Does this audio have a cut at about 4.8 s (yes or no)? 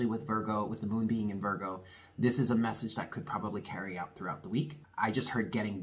yes